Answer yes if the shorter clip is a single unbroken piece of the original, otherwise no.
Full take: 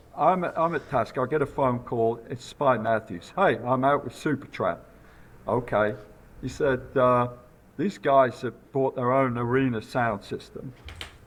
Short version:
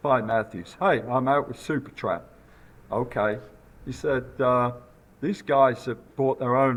yes